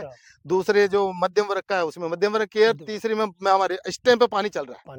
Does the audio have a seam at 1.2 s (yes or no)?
no